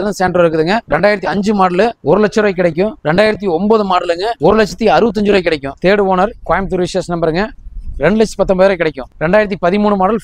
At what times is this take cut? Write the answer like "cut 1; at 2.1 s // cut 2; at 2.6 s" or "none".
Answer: cut 1; at 0.8 s // cut 2; at 2.0 s // cut 3; at 3.0 s // cut 4; at 4.3 s // cut 5; at 5.7 s